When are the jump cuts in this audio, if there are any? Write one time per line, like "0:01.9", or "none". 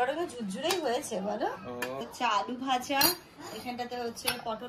0:02.1